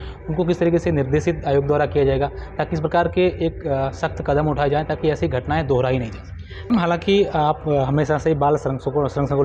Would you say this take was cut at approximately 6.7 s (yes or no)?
yes